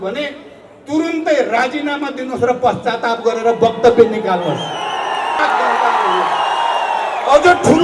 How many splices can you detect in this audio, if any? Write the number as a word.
one